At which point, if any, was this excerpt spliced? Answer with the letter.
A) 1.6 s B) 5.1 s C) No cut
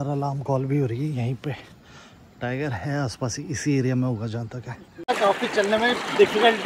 B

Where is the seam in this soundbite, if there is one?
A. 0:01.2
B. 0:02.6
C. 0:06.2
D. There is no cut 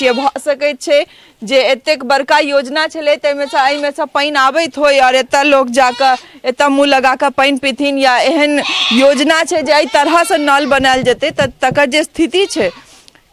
D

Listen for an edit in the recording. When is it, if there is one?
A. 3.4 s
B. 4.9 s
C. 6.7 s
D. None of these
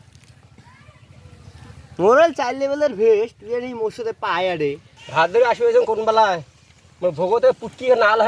B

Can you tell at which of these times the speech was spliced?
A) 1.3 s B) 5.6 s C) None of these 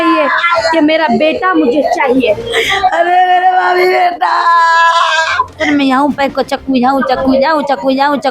B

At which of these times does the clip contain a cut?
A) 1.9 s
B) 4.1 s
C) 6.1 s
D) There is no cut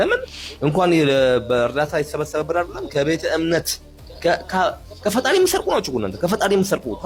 D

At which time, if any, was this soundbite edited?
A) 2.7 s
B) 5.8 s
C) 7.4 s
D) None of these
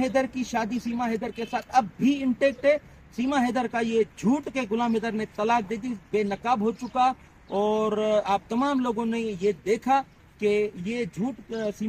D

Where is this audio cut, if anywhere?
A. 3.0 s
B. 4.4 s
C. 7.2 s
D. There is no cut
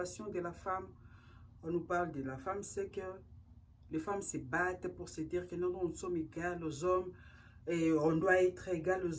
D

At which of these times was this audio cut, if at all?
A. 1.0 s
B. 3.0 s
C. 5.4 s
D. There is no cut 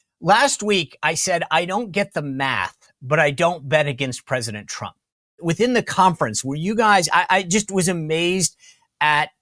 C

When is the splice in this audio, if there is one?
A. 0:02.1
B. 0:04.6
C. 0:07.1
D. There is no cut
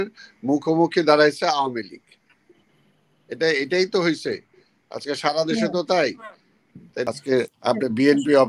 C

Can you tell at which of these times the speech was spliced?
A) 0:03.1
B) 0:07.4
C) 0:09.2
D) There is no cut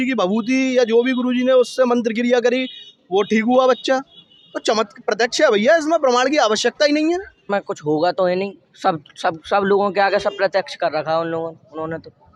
D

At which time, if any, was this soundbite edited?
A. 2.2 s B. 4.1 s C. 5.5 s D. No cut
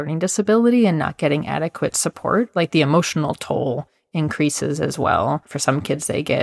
C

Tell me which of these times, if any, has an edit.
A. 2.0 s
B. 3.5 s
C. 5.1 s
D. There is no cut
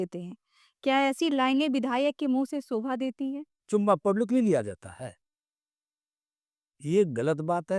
B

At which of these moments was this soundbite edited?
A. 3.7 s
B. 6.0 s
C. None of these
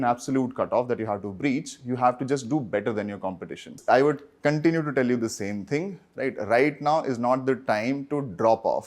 A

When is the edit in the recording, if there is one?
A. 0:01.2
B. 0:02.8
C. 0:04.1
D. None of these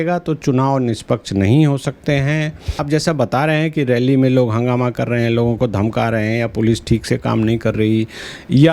B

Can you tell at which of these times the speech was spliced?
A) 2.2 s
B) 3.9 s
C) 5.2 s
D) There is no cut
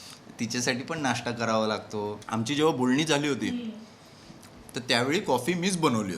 A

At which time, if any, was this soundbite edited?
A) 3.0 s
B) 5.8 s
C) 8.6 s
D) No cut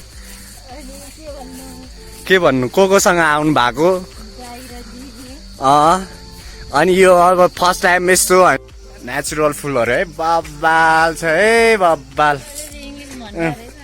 C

